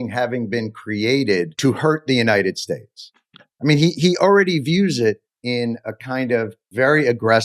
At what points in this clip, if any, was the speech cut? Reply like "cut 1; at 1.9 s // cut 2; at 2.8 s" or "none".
cut 1; at 1.5 s // cut 2; at 5.3 s // cut 3; at 6.6 s